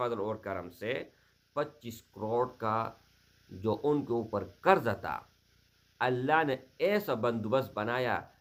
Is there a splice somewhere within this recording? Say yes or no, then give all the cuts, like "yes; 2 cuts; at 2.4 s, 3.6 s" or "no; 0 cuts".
no; 0 cuts